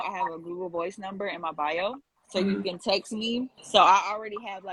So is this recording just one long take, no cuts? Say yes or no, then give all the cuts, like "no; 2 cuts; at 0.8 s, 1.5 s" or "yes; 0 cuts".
yes; 0 cuts